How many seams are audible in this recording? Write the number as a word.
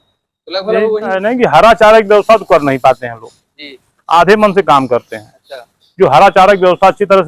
one